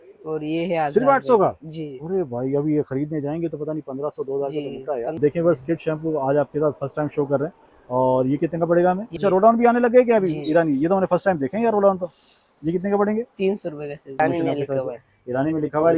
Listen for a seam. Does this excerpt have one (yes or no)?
yes